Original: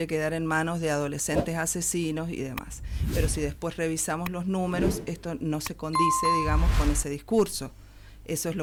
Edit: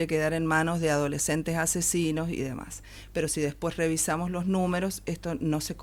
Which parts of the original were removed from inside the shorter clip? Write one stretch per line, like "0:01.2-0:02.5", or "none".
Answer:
none